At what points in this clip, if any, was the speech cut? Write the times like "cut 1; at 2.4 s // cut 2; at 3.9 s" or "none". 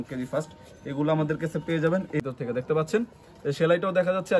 cut 1; at 2.2 s